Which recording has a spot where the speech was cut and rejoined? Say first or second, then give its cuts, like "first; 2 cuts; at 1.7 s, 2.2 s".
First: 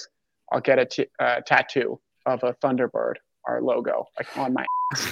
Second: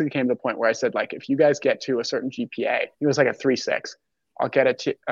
second; 1 cut; at 2.9 s